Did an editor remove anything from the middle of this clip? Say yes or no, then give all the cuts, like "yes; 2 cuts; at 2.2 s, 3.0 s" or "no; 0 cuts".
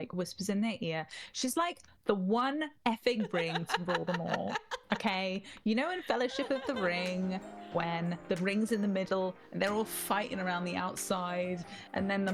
no; 0 cuts